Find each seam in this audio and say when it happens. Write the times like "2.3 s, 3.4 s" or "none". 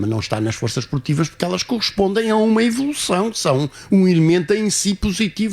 3.4 s